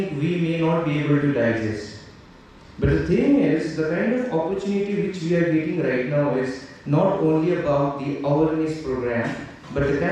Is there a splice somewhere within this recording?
no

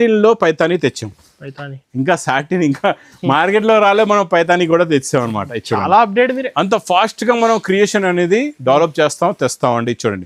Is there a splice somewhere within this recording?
no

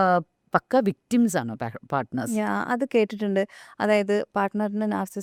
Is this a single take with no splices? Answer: yes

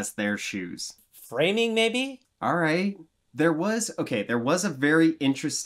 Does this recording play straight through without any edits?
yes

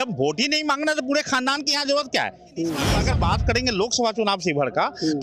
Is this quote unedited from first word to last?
no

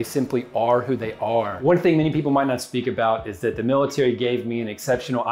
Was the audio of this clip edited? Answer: yes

